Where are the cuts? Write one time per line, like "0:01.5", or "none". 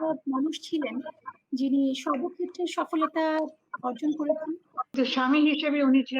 0:04.9